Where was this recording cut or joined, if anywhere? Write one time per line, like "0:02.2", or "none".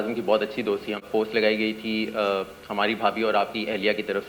0:01.1